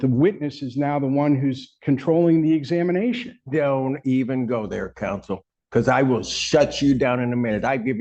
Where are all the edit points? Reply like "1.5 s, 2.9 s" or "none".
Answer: 5.5 s